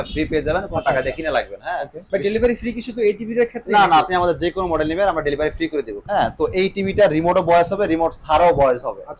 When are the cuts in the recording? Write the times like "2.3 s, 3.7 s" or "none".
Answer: 1.9 s, 6.0 s